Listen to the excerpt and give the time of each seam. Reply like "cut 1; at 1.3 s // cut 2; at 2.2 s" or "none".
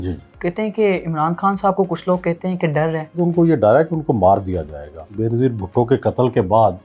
cut 1; at 3.2 s // cut 2; at 5.1 s